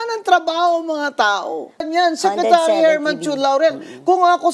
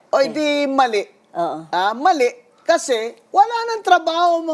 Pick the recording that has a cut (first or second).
first